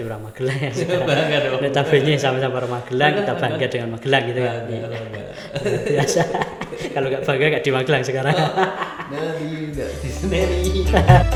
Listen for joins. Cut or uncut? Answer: uncut